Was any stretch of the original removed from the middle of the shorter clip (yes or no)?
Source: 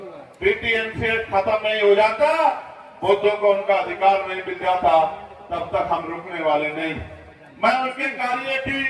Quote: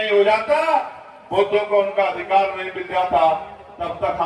no